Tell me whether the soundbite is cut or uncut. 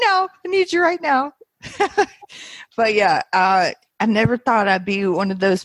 cut